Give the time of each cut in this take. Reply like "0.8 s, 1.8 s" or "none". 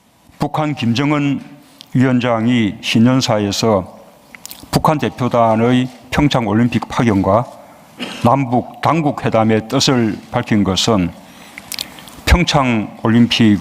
3.1 s

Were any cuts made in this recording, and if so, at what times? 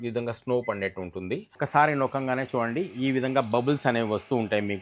1.6 s

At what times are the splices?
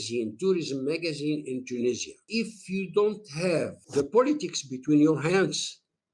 2.2 s, 3.8 s

